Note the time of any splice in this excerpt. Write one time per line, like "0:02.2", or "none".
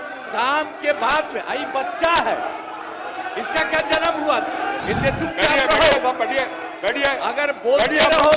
0:04.8